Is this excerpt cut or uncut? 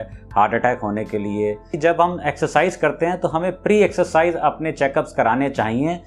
cut